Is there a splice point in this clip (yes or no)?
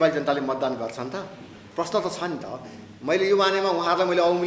no